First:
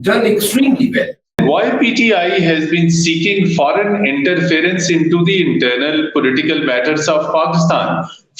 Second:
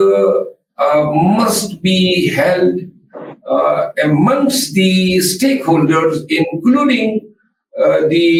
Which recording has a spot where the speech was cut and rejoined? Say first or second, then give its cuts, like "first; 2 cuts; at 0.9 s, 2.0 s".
first; 1 cut; at 1.4 s